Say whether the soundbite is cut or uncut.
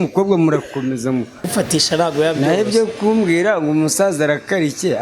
cut